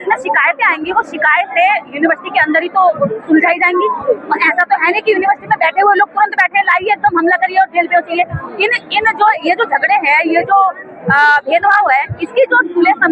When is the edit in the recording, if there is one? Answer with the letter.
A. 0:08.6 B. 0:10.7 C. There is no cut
C